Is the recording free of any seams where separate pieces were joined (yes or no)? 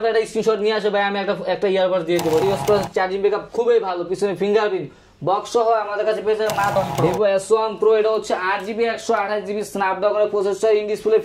no